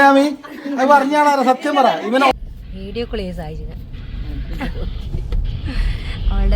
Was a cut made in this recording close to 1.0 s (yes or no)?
no